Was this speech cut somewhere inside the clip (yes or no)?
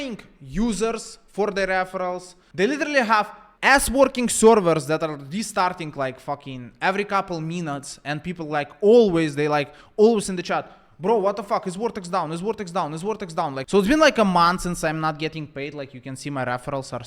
yes